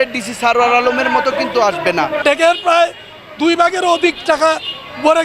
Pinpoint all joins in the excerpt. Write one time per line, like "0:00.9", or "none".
0:02.2